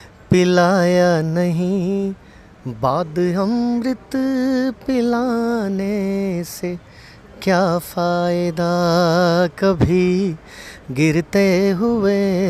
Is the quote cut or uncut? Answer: uncut